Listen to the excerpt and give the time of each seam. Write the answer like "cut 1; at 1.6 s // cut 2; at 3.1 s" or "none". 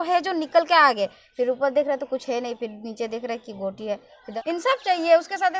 cut 1; at 4.2 s